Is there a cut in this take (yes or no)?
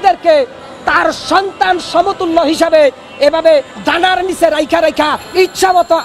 no